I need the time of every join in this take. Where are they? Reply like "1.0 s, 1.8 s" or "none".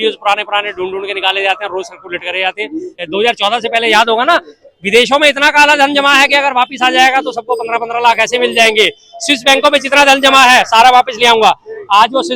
3.0 s